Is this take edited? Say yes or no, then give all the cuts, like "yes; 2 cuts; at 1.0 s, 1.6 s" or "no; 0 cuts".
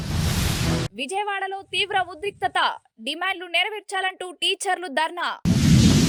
no; 0 cuts